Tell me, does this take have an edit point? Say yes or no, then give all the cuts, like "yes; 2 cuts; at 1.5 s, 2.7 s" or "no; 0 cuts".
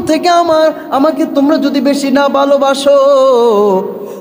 no; 0 cuts